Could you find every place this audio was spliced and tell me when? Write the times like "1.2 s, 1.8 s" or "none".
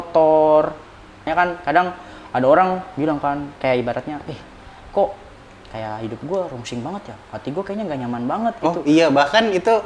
1.3 s